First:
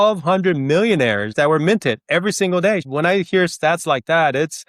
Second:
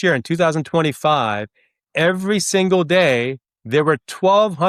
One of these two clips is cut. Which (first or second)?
first